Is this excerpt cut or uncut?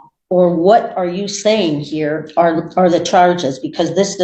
uncut